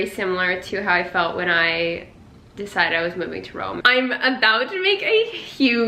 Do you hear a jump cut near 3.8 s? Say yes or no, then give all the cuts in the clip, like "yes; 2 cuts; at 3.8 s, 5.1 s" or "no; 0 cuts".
yes; 1 cut; at 3.8 s